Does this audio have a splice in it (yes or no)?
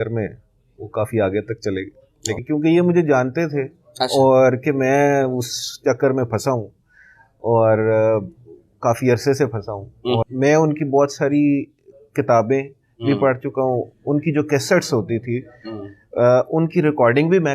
yes